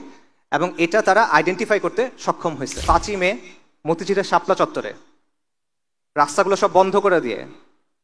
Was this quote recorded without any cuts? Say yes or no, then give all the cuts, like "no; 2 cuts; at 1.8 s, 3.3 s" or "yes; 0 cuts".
no; 1 cut; at 2.7 s